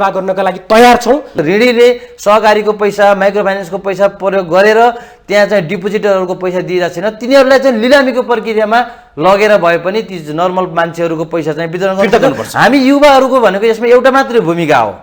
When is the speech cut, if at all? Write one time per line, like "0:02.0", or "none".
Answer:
0:01.4